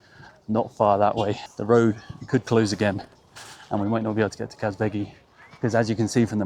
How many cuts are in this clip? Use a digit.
1